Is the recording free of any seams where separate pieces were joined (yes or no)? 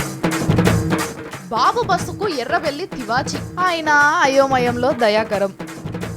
no